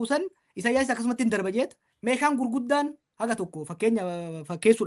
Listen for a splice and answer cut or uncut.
cut